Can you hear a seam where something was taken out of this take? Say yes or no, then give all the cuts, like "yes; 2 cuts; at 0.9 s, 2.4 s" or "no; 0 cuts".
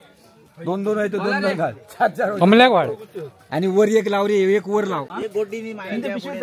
yes; 1 cut; at 5.1 s